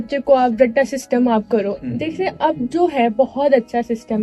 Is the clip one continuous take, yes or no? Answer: yes